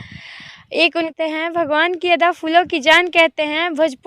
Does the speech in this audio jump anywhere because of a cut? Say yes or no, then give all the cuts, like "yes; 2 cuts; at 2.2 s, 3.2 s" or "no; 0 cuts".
yes; 1 cut; at 1.1 s